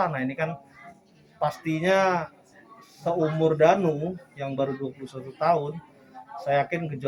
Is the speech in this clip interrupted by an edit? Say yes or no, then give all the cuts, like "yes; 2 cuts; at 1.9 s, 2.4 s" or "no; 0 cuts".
no; 0 cuts